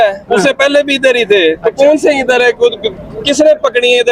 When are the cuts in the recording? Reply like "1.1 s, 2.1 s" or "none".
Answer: none